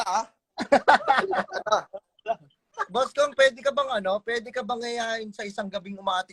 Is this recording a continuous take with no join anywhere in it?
no; 1 cut; at 2.6 s

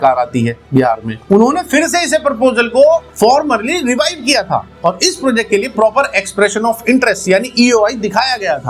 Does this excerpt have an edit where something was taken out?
no; 0 cuts

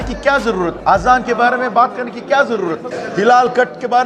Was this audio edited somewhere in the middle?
yes; 2 cuts; at 0.8 s, 2.9 s

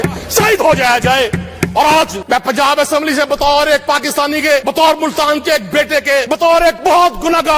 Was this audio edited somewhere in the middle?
yes; 3 cuts; at 2.2 s, 4.6 s, 6.6 s

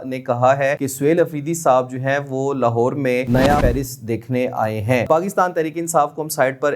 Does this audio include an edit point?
yes; 3 cuts; at 0.9 s, 3.5 s, 5.0 s

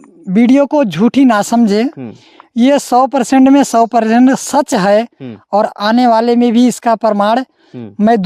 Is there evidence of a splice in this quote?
no; 0 cuts

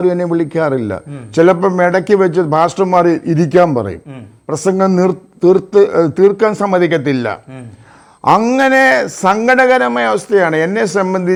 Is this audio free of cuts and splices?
yes; 0 cuts

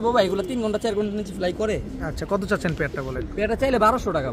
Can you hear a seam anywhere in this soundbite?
no; 0 cuts

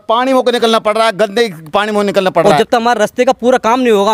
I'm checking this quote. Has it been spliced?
yes; 1 cut; at 2.5 s

